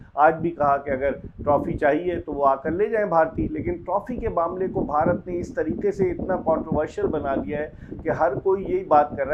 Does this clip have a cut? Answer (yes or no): no